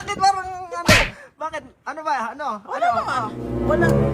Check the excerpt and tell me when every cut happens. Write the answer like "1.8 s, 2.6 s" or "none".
none